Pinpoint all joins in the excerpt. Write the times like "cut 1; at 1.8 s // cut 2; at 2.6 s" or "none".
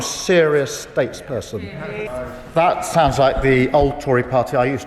cut 1; at 2.1 s